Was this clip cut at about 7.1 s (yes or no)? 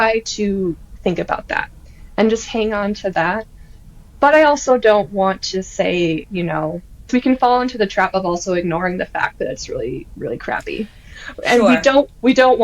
yes